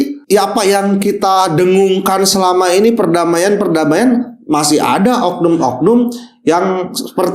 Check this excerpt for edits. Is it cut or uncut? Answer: uncut